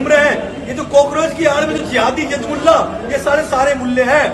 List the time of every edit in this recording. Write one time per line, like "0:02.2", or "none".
none